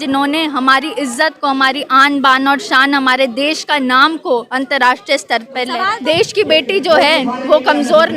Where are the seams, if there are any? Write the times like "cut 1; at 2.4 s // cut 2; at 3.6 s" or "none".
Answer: cut 1; at 5.8 s